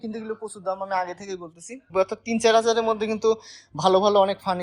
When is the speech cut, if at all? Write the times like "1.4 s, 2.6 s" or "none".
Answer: 1.9 s